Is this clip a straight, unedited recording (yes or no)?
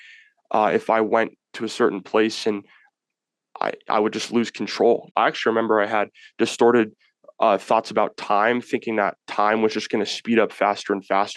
no